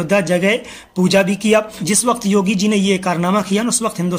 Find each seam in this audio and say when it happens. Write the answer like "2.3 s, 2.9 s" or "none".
1.8 s